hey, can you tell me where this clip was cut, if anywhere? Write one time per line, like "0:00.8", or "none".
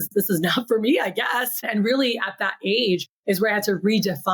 0:01.6
0:03.1